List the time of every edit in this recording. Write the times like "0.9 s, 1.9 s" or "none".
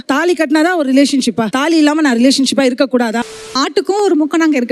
3.4 s